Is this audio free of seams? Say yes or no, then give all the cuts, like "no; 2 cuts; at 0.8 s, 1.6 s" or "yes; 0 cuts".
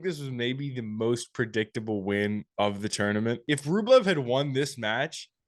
yes; 0 cuts